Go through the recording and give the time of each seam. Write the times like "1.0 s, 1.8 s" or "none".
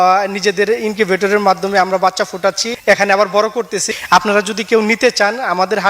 2.7 s, 3.8 s